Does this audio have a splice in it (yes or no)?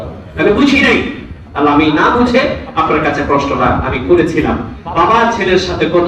yes